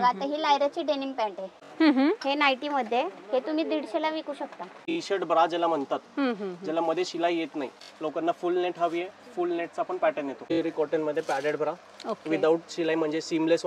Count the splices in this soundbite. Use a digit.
4